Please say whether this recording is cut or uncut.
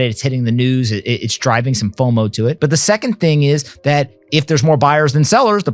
cut